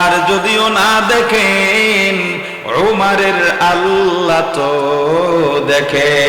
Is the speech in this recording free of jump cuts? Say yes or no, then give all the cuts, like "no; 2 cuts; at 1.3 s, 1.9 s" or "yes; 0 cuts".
yes; 0 cuts